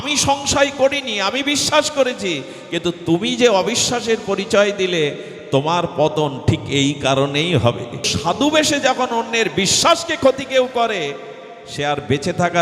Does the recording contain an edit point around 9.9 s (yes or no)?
no